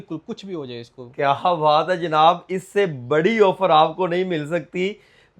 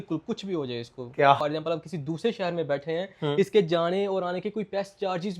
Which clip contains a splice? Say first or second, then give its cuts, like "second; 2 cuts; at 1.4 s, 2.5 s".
second; 1 cut; at 1.4 s